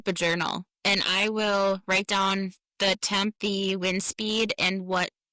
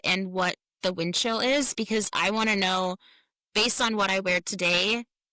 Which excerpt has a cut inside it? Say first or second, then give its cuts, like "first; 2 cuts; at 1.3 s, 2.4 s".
first; 1 cut; at 3.4 s